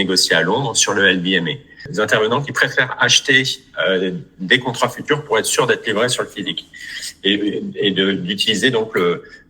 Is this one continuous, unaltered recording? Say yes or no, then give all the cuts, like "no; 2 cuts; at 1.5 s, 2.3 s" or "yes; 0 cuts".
no; 1 cut; at 1.9 s